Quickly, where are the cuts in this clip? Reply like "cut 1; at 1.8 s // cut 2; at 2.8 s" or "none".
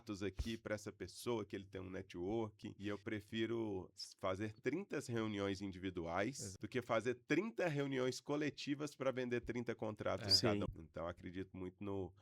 cut 1; at 2.7 s // cut 2; at 6.5 s // cut 3; at 10.7 s